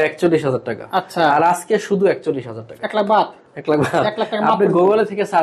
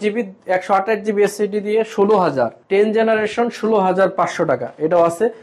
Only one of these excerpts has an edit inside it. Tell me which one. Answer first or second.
second